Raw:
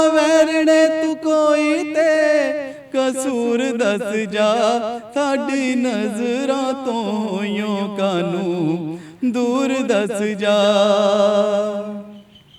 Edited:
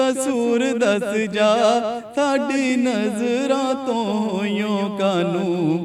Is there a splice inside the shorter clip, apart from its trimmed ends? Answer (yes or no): no